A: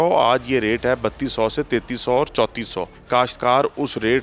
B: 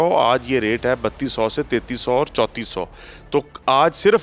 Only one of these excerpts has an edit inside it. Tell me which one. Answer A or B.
A